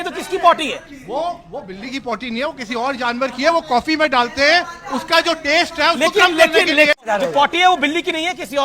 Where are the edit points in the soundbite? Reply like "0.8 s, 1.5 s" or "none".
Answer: 6.9 s